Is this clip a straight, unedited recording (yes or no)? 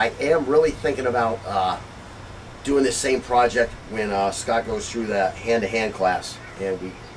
no